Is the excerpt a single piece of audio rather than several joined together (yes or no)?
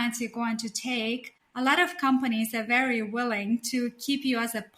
yes